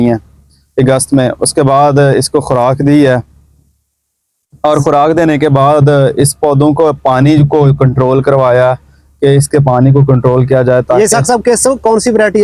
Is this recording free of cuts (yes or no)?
yes